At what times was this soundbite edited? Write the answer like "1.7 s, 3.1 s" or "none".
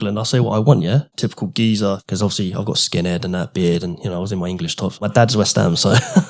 1.6 s, 5.1 s